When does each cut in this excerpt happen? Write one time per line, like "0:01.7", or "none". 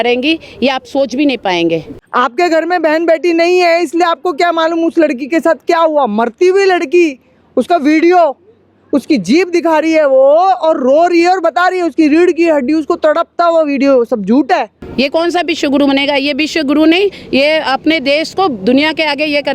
0:02.0
0:14.8